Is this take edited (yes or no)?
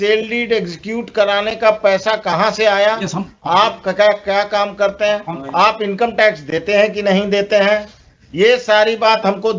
no